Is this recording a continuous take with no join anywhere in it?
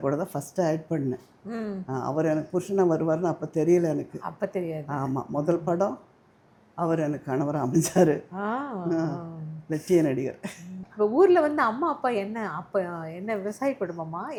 yes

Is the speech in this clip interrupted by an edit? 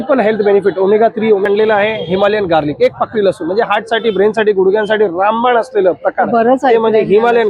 yes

